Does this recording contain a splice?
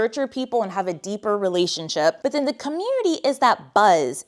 yes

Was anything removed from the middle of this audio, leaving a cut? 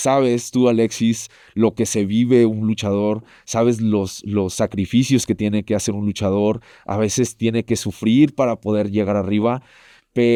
no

